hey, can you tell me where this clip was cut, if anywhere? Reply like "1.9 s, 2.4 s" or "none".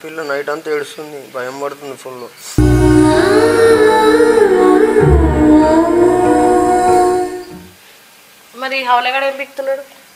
none